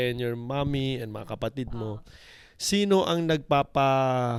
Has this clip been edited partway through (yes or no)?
no